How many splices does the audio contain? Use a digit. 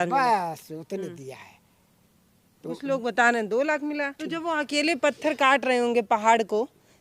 1